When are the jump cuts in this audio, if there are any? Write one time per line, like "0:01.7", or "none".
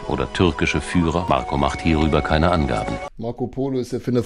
0:01.2
0:03.1